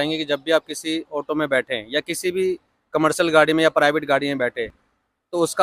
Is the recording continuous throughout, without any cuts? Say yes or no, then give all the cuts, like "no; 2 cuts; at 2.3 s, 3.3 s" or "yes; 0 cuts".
yes; 0 cuts